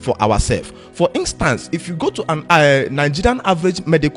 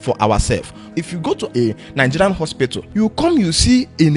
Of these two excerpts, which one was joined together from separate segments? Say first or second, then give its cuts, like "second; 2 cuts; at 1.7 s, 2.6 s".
second; 2 cuts; at 1.0 s, 2.8 s